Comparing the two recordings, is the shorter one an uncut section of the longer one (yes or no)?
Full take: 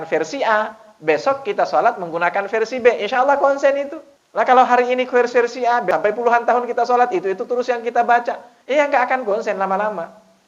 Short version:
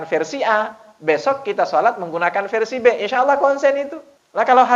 yes